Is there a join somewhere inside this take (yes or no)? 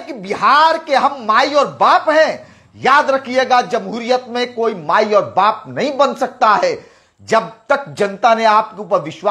no